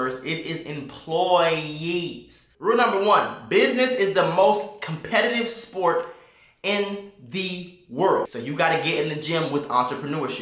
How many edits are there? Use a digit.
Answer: 2